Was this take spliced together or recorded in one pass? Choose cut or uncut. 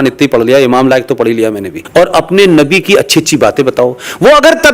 cut